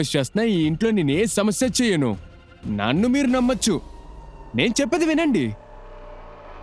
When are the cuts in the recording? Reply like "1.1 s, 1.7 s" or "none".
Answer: 5.6 s